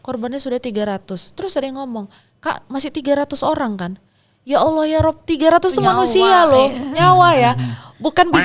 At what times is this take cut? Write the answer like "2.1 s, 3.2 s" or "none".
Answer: none

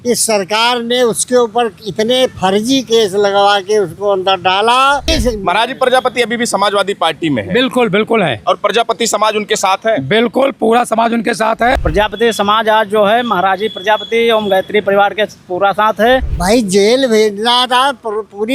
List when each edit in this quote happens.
5.1 s, 11.8 s, 16.3 s

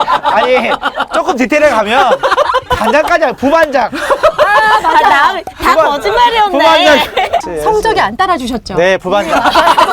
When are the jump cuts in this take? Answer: 7.4 s

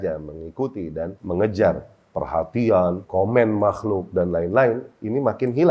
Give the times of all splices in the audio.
1.2 s, 3.0 s

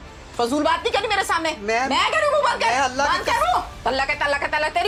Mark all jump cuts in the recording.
none

